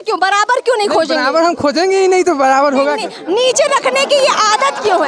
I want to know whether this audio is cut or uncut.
uncut